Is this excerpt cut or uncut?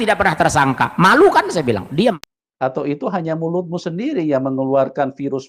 cut